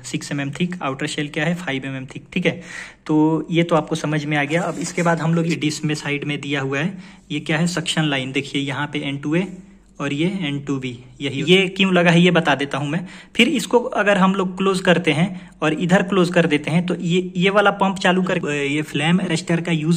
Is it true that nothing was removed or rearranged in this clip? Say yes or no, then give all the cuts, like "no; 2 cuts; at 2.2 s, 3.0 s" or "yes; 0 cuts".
no; 3 cuts; at 5.5 s, 11.4 s, 18.4 s